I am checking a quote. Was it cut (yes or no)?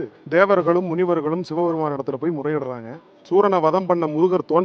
yes